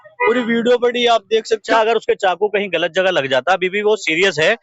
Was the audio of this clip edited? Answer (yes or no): yes